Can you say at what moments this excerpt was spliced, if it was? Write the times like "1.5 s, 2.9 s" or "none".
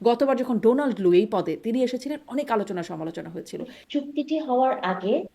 3.8 s